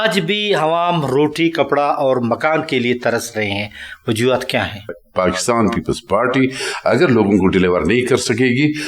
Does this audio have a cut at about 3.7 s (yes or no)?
no